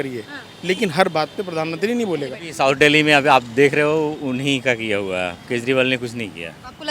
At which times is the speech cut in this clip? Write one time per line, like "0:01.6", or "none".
0:02.4